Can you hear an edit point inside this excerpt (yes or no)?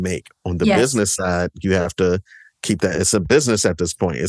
no